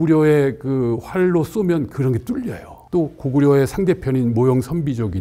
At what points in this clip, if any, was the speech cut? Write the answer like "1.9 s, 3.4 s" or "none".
none